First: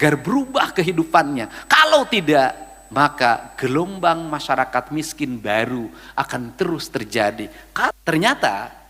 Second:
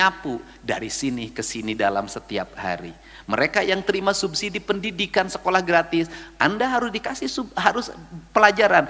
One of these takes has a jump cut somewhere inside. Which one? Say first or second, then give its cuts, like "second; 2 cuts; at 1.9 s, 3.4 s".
first; 1 cut; at 8.0 s